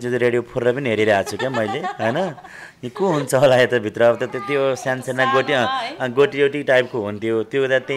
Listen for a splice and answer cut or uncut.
uncut